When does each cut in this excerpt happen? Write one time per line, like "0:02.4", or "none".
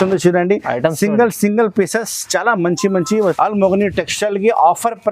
0:03.4